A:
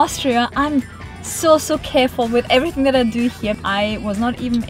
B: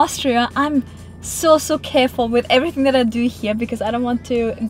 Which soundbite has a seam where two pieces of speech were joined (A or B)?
A